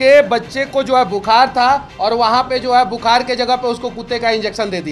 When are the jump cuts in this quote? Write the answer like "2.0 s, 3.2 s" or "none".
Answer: none